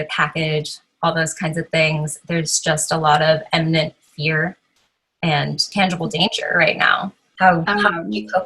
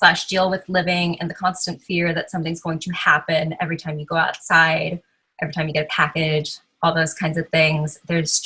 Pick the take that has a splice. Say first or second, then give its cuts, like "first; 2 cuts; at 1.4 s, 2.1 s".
first; 2 cuts; at 5.7 s, 7.2 s